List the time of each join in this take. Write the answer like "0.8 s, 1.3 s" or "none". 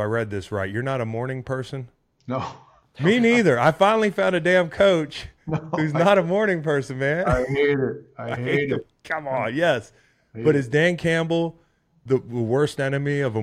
none